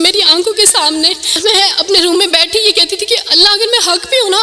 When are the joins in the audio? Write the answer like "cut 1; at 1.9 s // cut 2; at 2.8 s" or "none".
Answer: cut 1; at 1.4 s